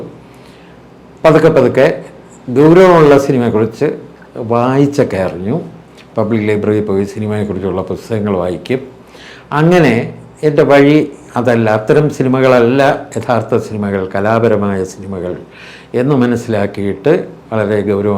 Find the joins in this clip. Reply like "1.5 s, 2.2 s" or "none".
none